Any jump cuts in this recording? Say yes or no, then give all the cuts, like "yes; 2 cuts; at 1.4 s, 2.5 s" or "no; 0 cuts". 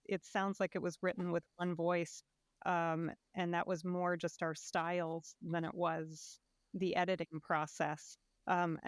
no; 0 cuts